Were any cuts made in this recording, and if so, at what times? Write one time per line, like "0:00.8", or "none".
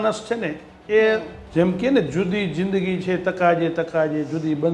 0:01.4